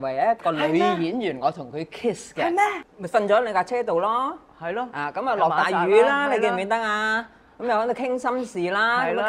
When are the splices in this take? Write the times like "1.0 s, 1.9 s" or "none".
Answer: 2.8 s